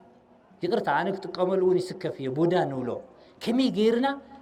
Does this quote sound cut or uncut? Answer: uncut